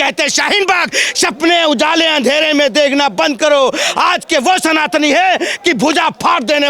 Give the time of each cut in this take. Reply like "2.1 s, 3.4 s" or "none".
none